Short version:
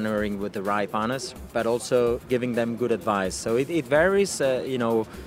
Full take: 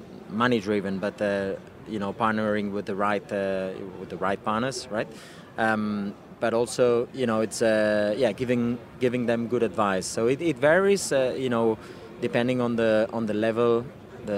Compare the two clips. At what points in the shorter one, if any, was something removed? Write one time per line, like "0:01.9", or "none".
0:00.9
0:02.2